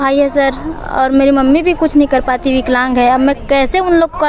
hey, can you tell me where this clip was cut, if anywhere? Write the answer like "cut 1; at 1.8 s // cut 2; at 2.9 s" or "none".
none